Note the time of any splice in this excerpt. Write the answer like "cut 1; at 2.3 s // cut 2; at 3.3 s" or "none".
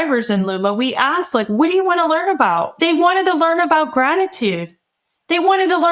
cut 1; at 2.7 s

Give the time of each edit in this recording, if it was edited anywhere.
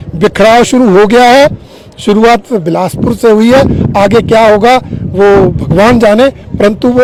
none

